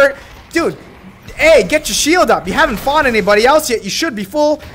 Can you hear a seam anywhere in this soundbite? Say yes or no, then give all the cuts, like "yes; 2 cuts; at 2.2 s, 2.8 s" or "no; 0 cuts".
no; 0 cuts